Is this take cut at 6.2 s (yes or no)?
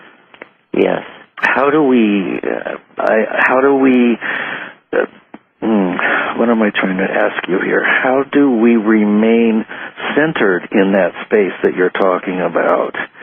yes